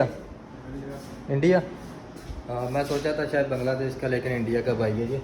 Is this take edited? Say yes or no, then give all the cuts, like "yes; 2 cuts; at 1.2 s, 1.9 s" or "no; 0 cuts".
no; 0 cuts